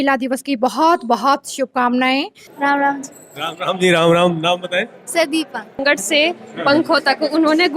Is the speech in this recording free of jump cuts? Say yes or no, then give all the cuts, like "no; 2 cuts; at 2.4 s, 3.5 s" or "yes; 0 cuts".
no; 2 cuts; at 2.4 s, 5.8 s